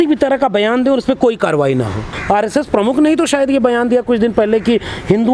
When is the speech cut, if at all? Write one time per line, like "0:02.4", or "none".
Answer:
0:02.2